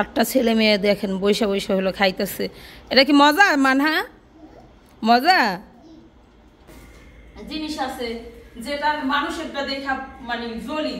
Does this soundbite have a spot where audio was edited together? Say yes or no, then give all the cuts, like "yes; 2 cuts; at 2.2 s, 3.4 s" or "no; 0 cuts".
yes; 1 cut; at 6.7 s